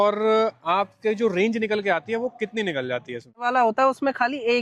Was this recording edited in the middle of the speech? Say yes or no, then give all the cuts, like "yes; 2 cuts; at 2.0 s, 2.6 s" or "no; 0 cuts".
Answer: yes; 1 cut; at 3.4 s